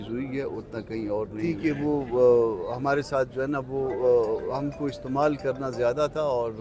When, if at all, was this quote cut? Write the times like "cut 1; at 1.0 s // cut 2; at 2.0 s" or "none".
cut 1; at 1.5 s